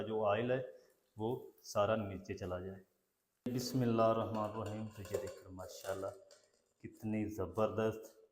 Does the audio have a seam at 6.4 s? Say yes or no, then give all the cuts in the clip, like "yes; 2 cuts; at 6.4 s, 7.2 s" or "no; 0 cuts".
no; 1 cut; at 3.5 s